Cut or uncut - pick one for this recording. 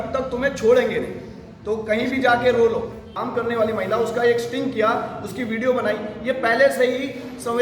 cut